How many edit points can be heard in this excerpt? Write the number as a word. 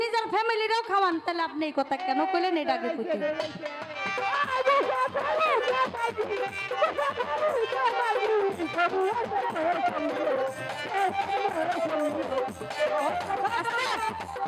zero